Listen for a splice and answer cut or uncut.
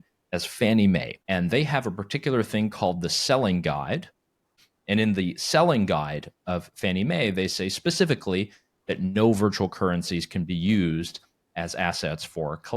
cut